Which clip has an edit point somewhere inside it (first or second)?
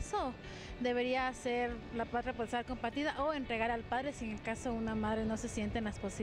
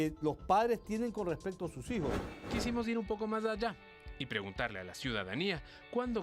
second